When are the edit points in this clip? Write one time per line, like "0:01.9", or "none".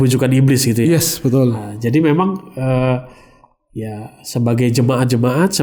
none